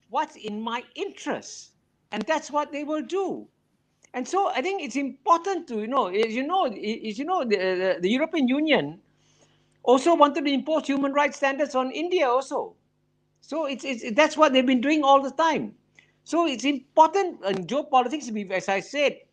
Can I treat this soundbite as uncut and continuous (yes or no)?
yes